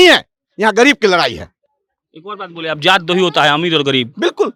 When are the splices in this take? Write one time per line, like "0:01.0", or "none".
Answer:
none

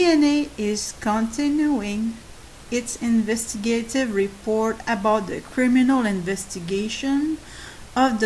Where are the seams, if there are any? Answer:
0:03.2

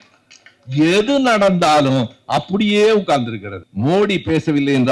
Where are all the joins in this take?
0:03.6

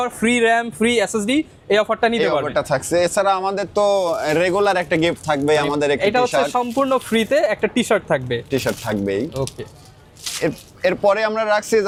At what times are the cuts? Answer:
none

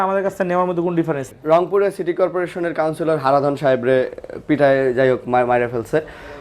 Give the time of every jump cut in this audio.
0:01.3

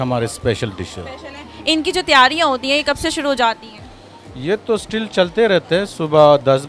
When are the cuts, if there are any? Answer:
none

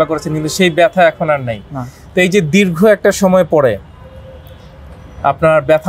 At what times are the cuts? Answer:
none

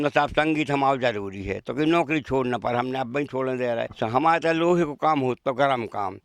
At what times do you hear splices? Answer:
0:03.9

